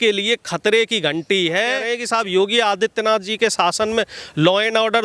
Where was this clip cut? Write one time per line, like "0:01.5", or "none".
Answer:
0:01.9